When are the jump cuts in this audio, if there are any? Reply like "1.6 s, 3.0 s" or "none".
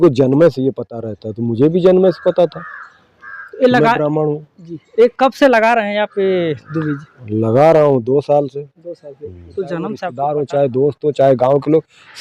10.1 s